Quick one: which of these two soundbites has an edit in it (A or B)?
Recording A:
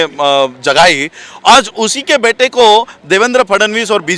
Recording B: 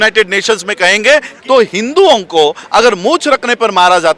B